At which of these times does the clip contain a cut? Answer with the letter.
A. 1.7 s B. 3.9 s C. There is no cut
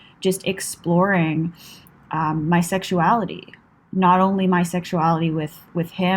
C